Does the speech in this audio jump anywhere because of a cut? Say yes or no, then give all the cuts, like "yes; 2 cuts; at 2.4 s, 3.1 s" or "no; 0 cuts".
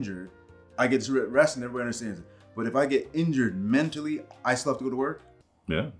no; 0 cuts